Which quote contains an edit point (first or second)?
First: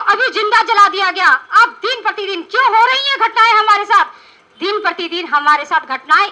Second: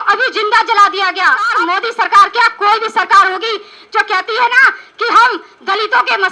second